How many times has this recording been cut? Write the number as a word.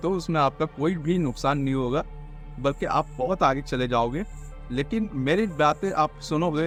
zero